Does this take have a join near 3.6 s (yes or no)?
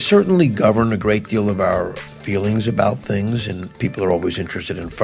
yes